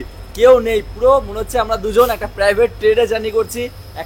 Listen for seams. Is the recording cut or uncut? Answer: uncut